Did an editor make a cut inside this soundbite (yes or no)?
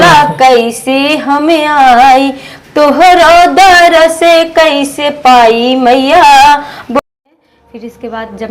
yes